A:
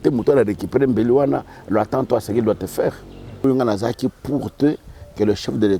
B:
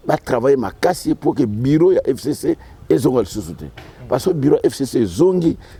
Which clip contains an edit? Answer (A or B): A